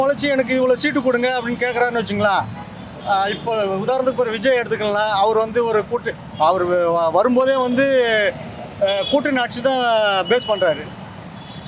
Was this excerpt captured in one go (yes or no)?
yes